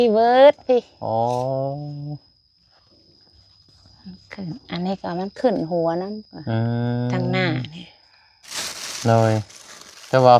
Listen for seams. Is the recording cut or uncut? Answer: uncut